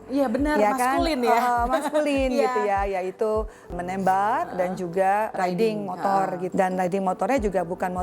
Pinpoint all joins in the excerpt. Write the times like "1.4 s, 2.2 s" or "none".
3.7 s, 5.4 s, 6.5 s